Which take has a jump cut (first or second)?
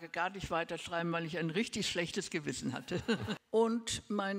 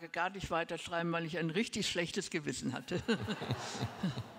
first